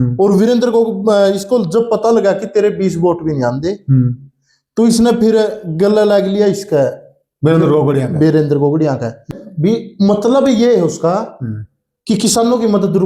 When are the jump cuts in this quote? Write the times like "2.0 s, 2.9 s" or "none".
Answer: 9.3 s